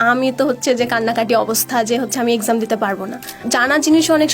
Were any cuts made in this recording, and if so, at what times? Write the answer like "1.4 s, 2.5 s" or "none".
3.4 s